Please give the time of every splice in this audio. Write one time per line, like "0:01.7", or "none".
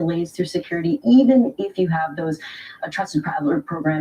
0:03.0